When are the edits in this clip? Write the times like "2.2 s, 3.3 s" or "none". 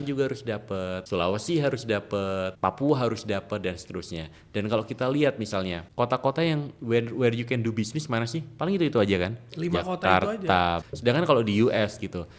1.0 s, 2.5 s, 5.8 s, 10.8 s